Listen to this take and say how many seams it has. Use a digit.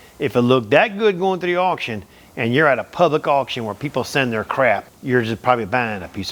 1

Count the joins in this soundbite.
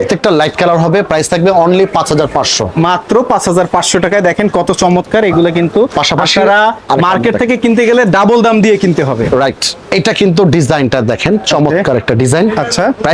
0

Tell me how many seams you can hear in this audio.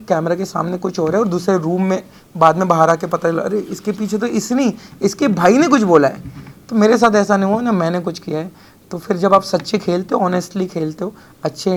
0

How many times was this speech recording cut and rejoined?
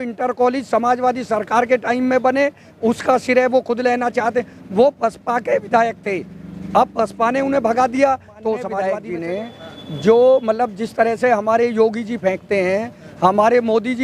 1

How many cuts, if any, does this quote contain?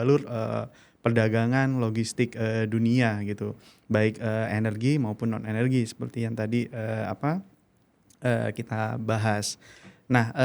0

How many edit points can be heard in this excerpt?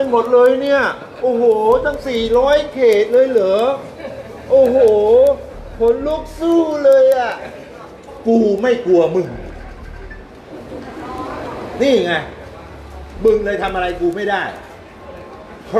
1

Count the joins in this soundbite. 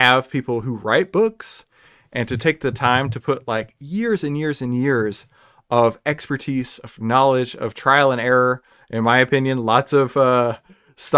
0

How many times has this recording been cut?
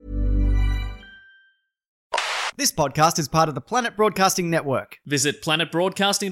1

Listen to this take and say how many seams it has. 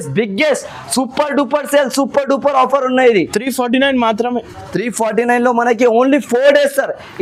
0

